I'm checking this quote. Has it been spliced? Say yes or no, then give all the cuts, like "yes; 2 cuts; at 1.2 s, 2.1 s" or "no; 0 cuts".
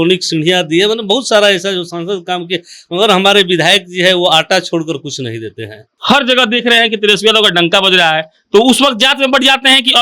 yes; 1 cut; at 5.8 s